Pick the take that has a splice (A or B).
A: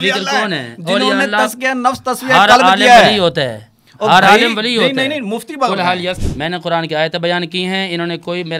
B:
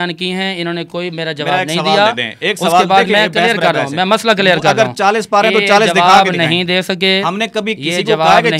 A